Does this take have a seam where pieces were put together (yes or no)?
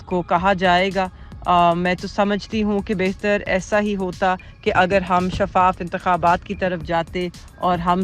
no